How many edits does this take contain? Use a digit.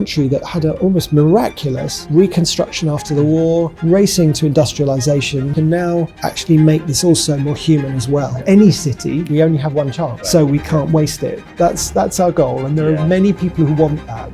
5